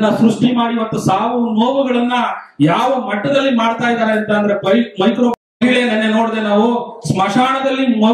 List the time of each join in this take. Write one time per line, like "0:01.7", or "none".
0:05.5